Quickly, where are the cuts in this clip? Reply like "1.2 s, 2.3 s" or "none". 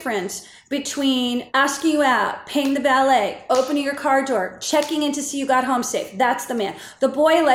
none